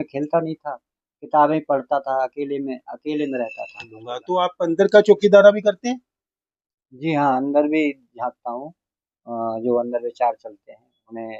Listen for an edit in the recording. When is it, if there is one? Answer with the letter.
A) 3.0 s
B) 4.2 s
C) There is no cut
B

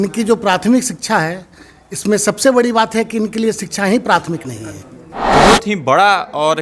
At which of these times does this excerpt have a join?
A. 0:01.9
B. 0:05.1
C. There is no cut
B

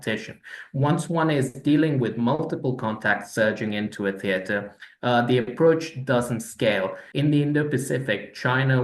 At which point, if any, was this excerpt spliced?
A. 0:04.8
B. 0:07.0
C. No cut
B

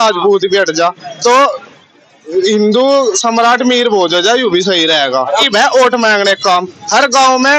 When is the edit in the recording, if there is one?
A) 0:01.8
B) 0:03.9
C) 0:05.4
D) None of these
C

